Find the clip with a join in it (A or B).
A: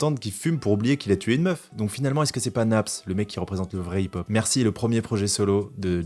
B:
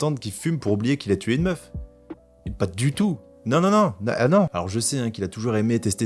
A